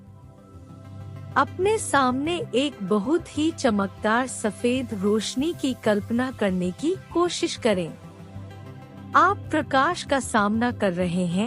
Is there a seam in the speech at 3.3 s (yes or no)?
no